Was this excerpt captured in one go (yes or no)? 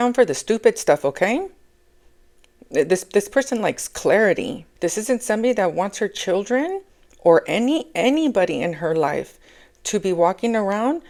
yes